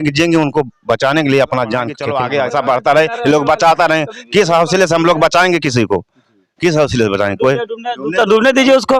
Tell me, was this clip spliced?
yes; 1 cut; at 2.0 s

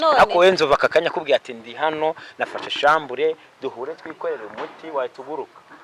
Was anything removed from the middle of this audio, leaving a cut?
no; 0 cuts

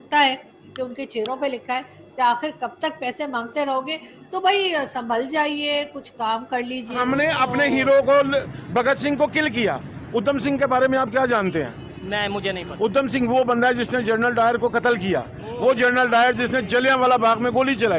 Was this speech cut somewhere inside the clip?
yes; 1 cut; at 7.0 s

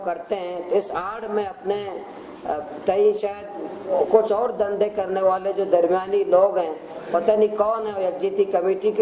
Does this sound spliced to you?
no; 0 cuts

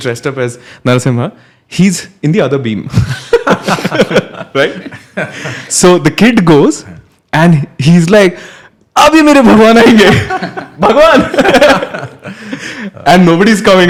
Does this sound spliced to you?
no; 0 cuts

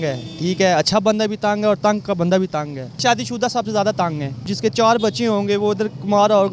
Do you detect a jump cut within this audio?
yes; 2 cuts; at 3.0 s, 4.5 s

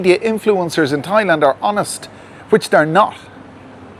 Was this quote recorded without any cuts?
yes; 0 cuts

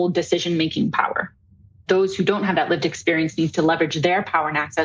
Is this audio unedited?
no; 1 cut; at 1.8 s

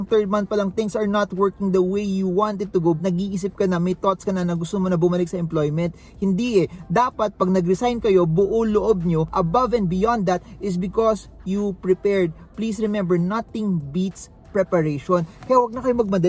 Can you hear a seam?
no; 0 cuts

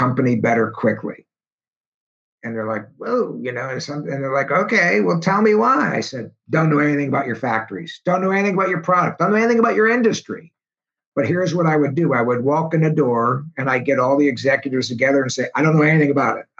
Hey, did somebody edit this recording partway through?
no; 0 cuts

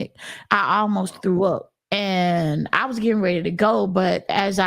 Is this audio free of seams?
no; 1 cut; at 1.7 s

